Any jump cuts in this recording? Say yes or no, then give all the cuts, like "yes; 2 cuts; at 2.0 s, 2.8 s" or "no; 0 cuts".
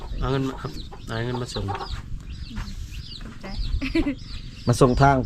no; 0 cuts